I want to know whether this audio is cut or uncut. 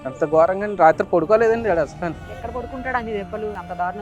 uncut